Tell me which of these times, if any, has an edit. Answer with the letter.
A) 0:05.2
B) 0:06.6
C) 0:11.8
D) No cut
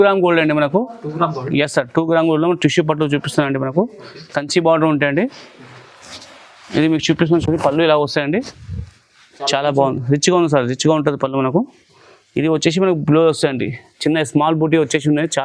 D